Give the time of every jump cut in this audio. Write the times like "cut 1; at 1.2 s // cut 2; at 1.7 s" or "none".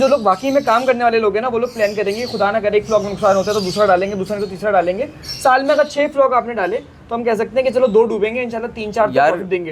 none